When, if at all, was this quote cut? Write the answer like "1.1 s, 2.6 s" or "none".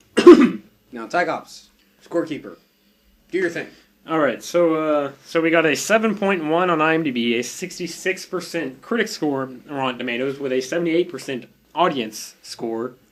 none

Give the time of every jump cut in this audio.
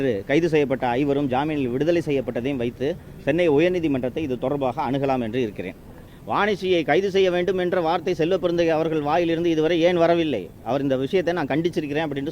6.1 s

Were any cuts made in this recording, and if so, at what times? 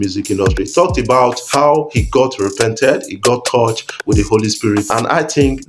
1.4 s, 4.9 s

